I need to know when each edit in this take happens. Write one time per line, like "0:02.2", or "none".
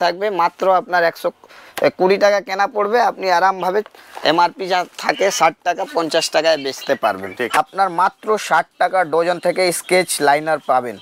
0:07.6